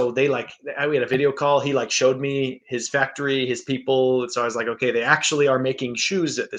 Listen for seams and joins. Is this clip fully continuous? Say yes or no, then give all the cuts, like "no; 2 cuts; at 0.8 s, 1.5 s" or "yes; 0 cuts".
yes; 0 cuts